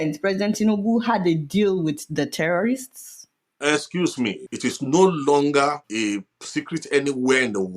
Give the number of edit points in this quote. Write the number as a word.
two